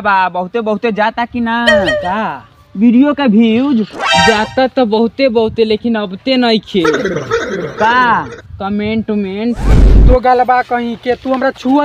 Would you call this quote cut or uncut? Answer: cut